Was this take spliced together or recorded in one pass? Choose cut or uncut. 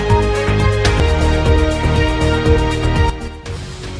cut